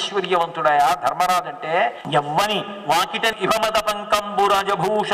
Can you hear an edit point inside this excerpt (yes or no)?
yes